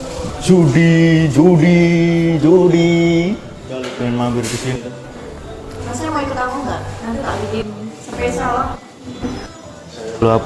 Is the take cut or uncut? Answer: cut